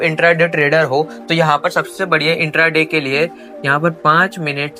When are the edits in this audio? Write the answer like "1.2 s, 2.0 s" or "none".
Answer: none